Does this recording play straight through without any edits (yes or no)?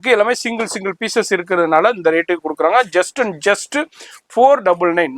yes